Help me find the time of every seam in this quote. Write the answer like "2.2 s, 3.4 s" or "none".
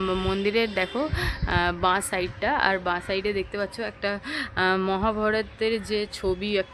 none